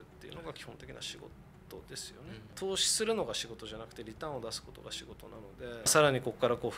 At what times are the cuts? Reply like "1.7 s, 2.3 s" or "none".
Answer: 2.5 s, 5.9 s